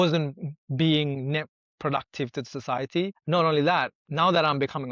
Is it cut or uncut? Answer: cut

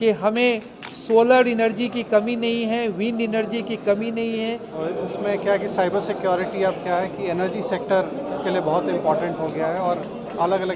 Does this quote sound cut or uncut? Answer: cut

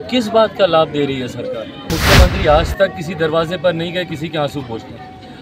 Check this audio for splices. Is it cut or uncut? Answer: cut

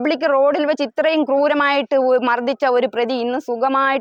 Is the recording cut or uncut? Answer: uncut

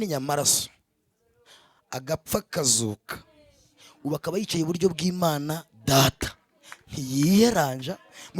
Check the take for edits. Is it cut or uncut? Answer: uncut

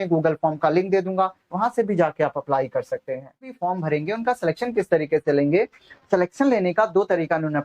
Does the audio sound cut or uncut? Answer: cut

